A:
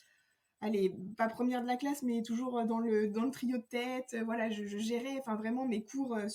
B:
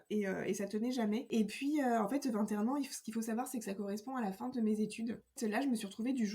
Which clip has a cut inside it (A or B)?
B